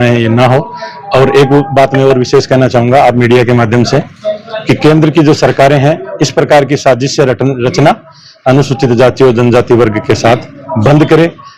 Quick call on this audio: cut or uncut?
uncut